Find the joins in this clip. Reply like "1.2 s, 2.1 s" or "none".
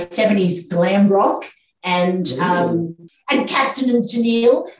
3.0 s